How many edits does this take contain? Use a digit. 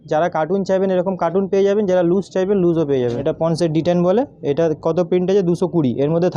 1